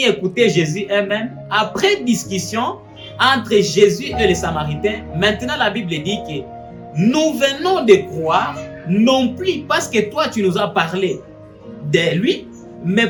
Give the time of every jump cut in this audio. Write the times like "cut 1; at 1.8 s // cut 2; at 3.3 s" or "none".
none